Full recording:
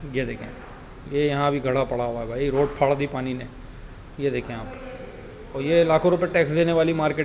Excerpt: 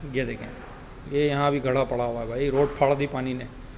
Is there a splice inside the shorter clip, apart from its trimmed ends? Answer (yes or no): no